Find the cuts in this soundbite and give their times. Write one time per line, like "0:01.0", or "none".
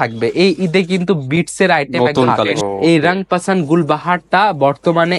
0:02.5